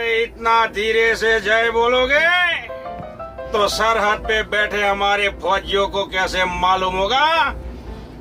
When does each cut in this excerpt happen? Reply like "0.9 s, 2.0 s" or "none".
none